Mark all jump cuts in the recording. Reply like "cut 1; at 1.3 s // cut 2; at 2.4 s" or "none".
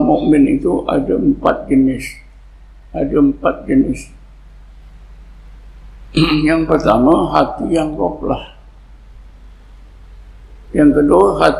none